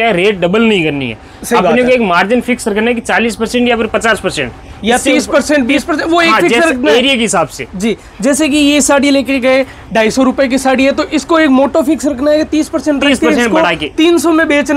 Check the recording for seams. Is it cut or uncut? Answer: uncut